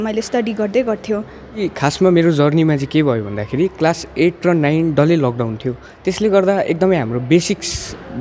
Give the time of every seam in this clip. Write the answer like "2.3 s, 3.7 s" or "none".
1.6 s